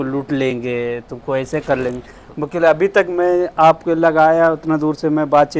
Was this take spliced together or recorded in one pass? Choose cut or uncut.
uncut